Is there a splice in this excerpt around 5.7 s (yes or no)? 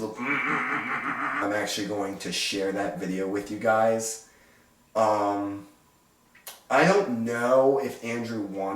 no